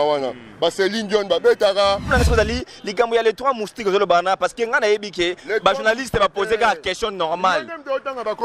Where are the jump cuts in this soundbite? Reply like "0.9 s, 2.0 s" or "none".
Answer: 2.1 s